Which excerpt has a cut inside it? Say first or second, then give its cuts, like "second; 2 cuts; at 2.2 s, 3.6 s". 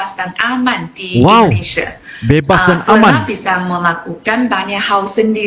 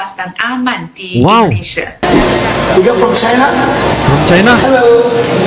second; 1 cut; at 2.0 s